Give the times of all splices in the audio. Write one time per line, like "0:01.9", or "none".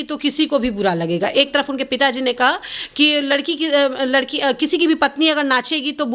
none